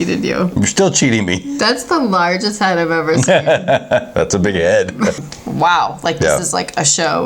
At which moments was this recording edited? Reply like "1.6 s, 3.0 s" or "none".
1.5 s, 5.2 s